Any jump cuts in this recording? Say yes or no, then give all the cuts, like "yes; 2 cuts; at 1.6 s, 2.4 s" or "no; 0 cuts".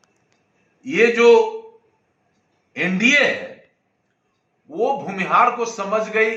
no; 0 cuts